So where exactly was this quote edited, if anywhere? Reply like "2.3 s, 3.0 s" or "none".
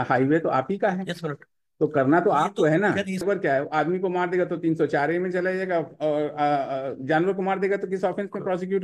3.2 s

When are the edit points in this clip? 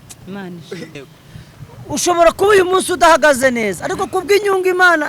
1.0 s

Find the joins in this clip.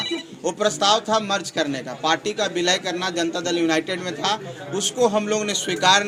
none

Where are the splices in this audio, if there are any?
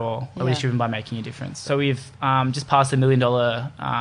1.6 s

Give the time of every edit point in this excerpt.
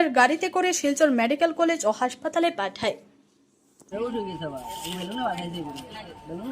3.7 s

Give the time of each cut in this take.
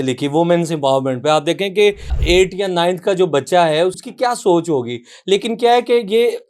2.1 s, 3.9 s

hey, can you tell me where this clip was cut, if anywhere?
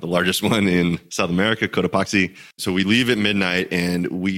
2.6 s

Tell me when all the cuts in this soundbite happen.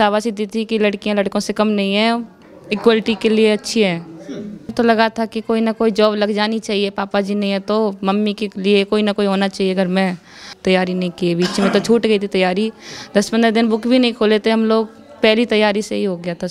4.7 s, 10.5 s

